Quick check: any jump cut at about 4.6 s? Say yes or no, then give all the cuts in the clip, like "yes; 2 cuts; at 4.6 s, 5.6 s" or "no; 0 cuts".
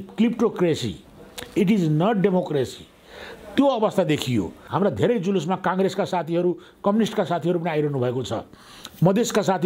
yes; 1 cut; at 4.6 s